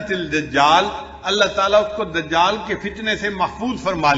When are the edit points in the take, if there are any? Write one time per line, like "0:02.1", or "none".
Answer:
none